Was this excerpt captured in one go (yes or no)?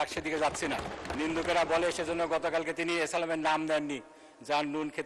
no